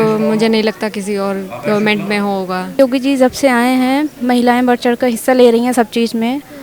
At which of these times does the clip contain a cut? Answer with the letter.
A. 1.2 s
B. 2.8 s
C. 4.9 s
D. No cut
B